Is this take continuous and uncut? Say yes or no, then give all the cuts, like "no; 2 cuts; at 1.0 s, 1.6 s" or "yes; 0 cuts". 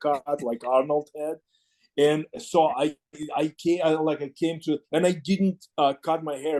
yes; 0 cuts